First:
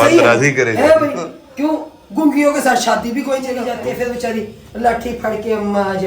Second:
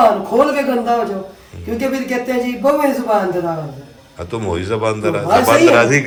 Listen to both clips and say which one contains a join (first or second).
first